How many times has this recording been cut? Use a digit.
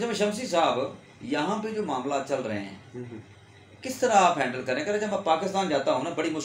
0